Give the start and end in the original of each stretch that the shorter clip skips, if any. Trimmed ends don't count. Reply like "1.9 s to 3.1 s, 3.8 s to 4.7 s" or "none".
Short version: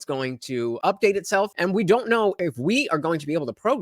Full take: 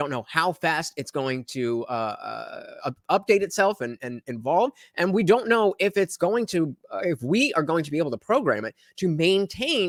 1.8 s to 3.0 s, 3.8 s to 4.9 s, 5.8 s to 7.0 s